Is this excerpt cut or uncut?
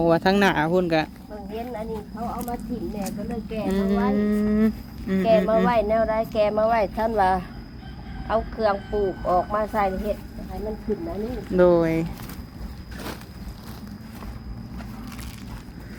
uncut